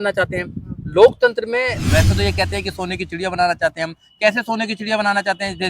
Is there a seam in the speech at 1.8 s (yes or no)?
yes